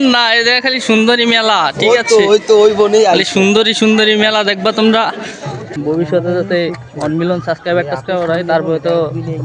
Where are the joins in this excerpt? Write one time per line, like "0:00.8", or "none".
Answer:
0:05.7